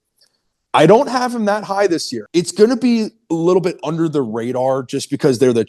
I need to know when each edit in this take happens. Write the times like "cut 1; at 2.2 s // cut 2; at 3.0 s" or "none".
cut 1; at 2.2 s